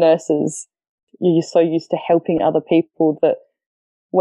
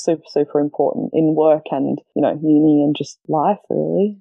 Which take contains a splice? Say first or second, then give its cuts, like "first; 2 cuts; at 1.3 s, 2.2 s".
second; 2 cuts; at 2.0 s, 3.1 s